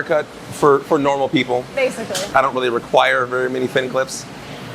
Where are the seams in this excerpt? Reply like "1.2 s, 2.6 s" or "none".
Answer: 2.2 s